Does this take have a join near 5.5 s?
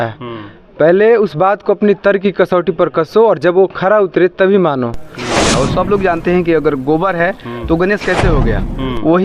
yes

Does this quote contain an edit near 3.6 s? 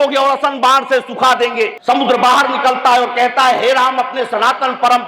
no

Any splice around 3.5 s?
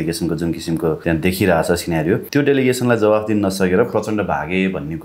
no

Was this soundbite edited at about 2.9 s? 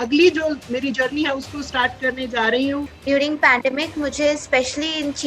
yes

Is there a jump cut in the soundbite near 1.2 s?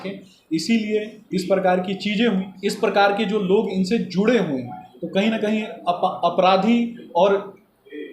no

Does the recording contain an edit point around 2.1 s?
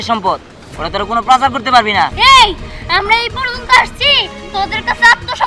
yes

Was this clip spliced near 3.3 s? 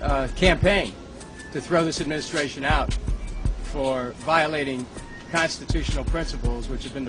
yes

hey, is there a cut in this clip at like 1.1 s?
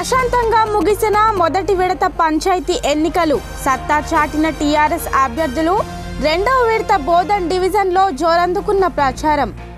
no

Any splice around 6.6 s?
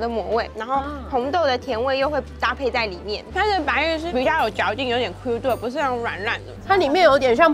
yes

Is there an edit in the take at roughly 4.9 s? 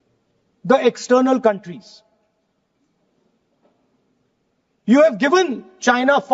no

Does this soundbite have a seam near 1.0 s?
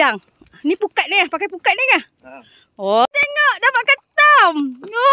no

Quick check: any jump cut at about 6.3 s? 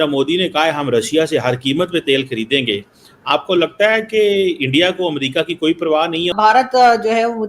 yes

